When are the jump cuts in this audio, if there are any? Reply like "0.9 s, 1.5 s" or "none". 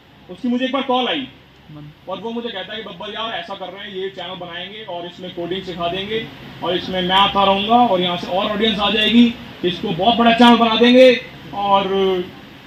none